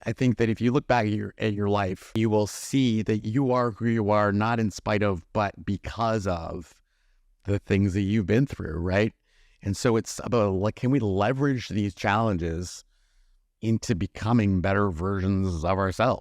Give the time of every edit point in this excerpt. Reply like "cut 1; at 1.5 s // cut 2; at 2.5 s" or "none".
cut 1; at 2.0 s